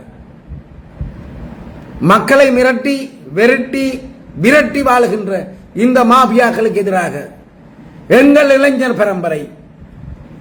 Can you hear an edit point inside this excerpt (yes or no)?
no